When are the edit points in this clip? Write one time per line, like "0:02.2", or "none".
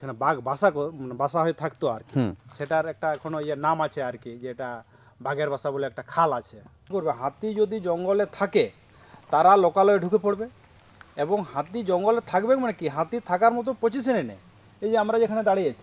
0:06.9

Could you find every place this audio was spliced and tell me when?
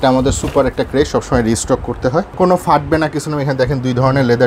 0:02.3

